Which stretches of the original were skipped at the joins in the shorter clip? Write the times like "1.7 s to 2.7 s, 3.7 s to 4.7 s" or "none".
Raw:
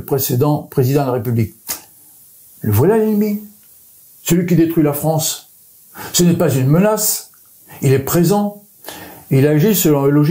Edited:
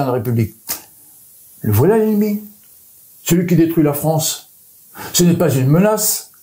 none